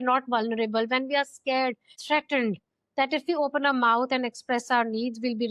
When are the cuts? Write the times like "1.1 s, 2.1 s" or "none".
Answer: 2.0 s